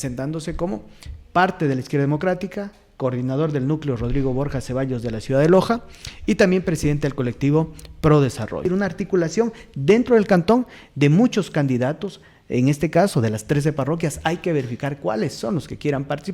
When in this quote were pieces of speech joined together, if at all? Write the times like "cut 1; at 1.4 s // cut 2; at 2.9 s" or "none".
cut 1; at 8.6 s